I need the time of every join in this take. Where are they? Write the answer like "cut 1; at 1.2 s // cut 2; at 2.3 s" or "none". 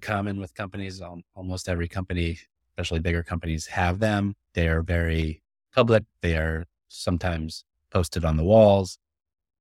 none